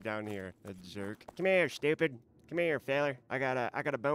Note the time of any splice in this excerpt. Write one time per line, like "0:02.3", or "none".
0:01.2

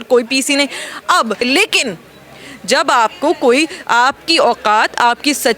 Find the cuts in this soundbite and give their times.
0:01.4

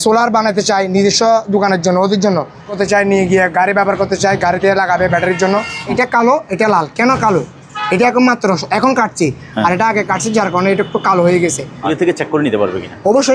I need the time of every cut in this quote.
0:02.7
0:05.9
0:11.8

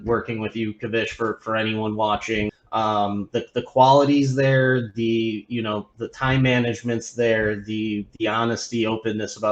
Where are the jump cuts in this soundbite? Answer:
0:02.6

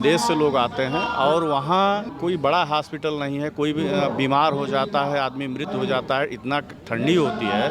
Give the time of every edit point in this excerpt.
0:02.1

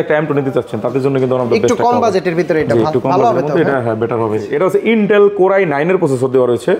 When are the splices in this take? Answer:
0:04.5

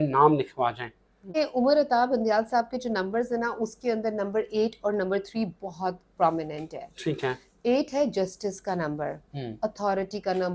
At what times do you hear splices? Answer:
0:01.3

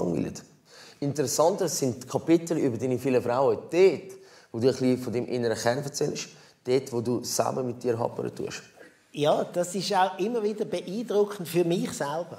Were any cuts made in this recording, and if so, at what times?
0:09.3

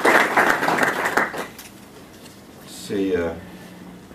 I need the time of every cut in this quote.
0:00.9

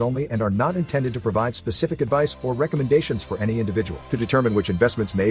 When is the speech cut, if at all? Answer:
none

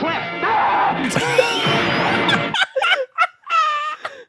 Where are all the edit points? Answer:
none

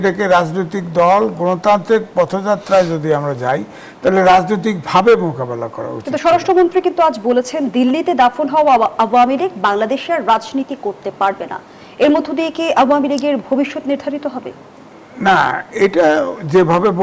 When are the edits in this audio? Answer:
none

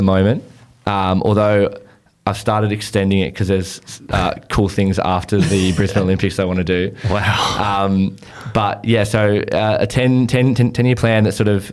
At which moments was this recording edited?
none

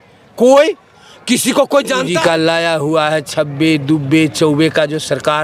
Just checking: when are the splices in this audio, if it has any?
0:02.1

